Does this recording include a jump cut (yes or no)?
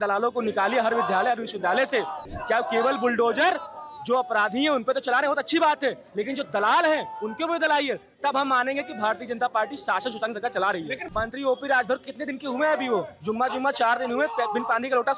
yes